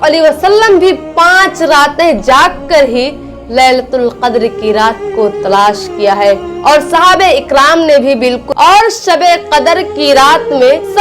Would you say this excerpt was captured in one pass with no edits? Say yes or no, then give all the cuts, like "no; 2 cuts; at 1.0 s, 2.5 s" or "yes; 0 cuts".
no; 1 cut; at 8.4 s